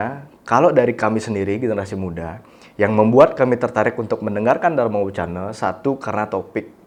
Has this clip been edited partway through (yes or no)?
no